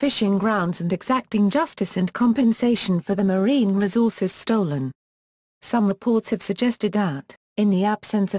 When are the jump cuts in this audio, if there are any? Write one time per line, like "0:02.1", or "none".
none